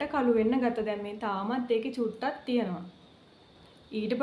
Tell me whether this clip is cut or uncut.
uncut